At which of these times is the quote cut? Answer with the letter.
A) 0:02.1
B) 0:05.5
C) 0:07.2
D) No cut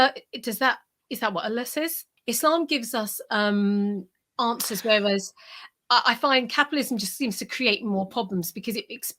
A